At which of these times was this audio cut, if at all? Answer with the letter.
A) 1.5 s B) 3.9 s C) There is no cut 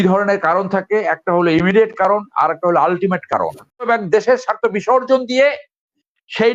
B